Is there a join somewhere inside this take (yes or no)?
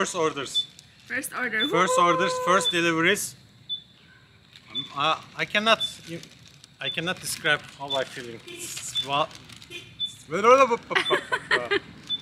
no